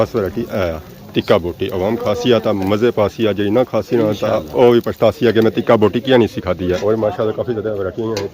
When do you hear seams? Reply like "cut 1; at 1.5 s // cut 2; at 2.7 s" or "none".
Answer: cut 1; at 6.8 s